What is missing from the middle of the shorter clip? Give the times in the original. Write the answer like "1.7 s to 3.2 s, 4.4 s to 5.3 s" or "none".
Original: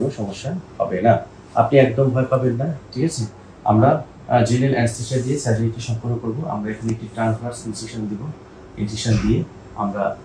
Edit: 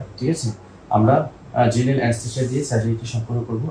none